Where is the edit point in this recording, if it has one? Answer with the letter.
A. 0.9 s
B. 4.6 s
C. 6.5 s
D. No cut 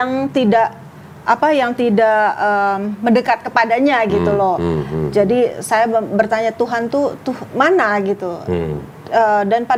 D